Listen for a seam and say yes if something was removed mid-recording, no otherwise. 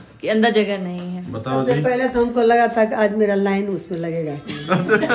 no